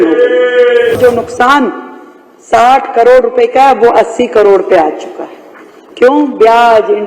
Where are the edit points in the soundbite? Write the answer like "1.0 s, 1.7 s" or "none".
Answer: 1.0 s